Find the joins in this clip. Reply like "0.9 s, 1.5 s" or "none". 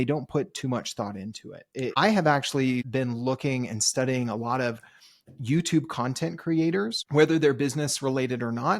1.9 s, 2.9 s, 7.0 s